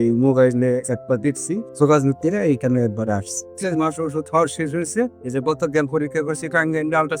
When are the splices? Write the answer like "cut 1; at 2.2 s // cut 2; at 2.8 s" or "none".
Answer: cut 1; at 1.7 s // cut 2; at 3.5 s